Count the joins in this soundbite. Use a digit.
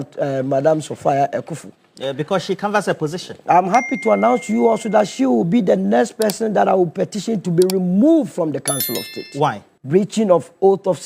1